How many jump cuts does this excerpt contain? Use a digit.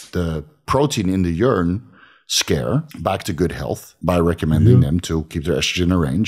2